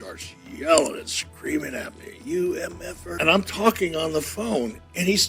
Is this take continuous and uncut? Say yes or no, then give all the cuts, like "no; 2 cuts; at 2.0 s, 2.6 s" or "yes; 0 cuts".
no; 1 cut; at 3.1 s